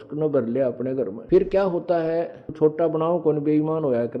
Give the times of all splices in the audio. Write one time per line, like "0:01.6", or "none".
0:01.2
0:02.5